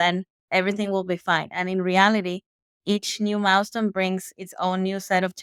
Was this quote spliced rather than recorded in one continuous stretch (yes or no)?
no